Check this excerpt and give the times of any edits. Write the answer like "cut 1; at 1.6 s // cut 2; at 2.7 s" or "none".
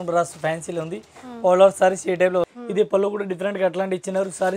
cut 1; at 2.5 s